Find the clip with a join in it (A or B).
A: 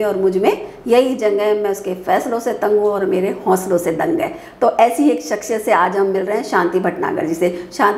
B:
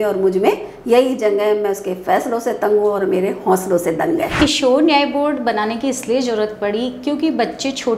B